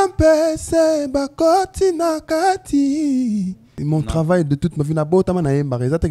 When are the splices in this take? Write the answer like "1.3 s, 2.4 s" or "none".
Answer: 3.7 s